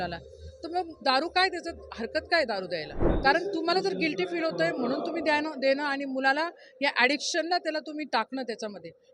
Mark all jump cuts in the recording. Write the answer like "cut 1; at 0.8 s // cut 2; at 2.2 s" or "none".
cut 1; at 3.0 s